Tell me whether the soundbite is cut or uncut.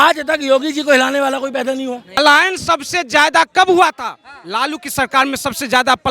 cut